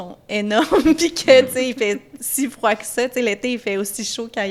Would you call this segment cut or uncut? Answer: uncut